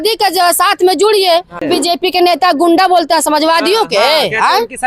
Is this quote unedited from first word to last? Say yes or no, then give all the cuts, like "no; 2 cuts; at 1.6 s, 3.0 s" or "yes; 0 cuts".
no; 1 cut; at 1.6 s